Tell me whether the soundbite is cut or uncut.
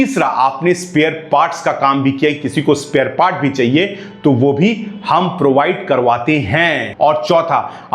cut